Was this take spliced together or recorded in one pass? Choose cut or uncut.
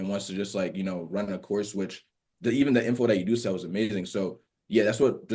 uncut